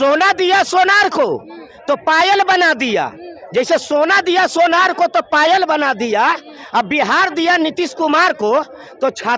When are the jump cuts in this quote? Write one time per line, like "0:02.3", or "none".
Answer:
none